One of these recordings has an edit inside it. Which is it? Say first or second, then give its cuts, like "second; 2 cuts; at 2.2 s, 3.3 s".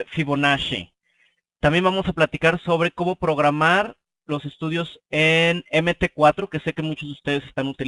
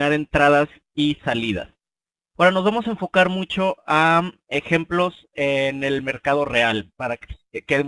first; 1 cut; at 6.0 s